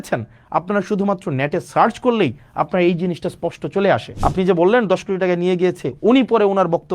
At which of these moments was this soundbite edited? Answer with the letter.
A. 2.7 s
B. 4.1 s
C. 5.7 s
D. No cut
B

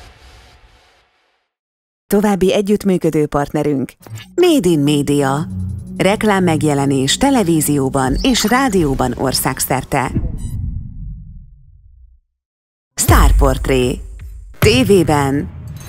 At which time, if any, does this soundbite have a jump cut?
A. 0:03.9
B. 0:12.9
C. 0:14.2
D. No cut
B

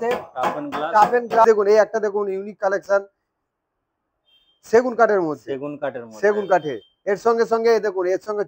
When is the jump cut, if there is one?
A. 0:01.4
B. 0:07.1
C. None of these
A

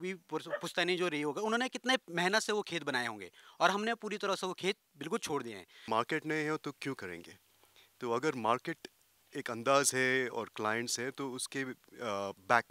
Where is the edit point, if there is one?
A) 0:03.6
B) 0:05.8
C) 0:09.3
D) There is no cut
B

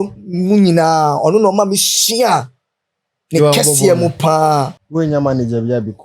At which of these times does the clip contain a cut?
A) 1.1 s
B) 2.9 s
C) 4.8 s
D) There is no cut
C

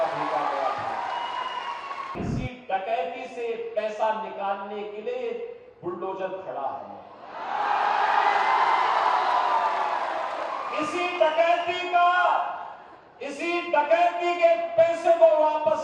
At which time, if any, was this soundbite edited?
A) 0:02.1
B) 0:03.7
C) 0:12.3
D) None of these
A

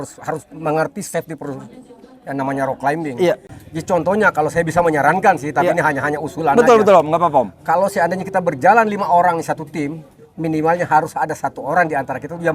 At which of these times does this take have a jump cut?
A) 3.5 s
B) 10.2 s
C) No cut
A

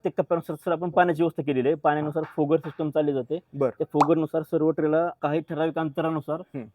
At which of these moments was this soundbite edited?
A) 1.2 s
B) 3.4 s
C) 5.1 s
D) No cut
C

